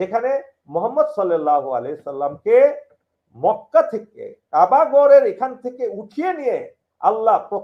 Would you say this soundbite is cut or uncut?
uncut